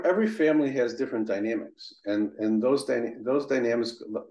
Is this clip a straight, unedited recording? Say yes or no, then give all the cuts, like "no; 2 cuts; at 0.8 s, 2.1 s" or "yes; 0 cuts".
yes; 0 cuts